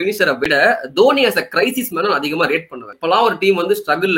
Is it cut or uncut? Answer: cut